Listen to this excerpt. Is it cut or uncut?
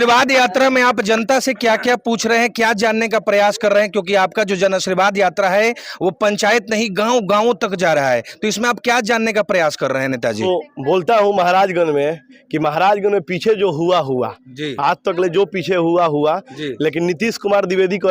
cut